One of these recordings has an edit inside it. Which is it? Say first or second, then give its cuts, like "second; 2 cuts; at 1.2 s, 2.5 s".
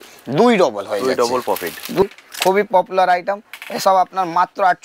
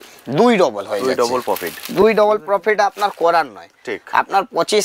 first; 1 cut; at 2.0 s